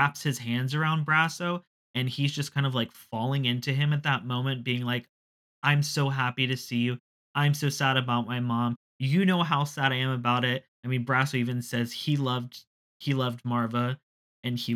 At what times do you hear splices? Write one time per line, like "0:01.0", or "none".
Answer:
none